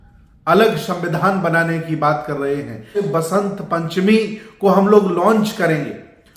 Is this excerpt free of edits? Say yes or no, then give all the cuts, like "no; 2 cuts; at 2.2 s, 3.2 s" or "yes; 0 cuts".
no; 1 cut; at 3.0 s